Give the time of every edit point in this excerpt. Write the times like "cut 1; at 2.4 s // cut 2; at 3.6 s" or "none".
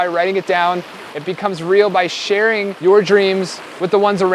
cut 1; at 2.7 s